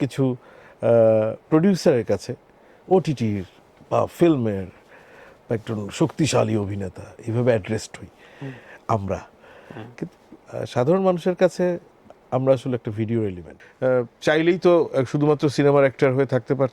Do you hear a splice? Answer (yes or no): yes